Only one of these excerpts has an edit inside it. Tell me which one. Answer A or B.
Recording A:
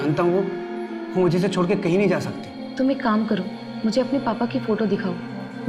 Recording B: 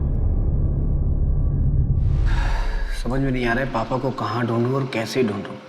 B